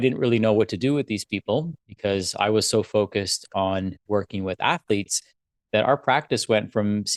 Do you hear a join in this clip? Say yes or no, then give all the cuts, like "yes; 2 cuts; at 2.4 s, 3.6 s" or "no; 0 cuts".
no; 0 cuts